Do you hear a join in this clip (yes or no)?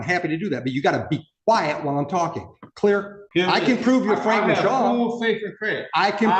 yes